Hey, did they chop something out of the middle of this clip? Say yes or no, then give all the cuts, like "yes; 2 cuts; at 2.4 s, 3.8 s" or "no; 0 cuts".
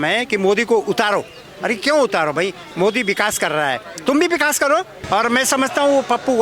yes; 1 cut; at 5.0 s